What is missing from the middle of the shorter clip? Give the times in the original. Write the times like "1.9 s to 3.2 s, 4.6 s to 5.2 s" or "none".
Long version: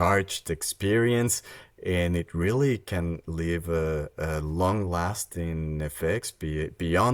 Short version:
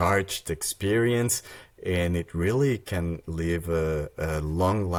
none